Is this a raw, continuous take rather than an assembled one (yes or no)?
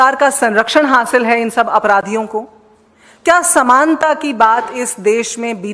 yes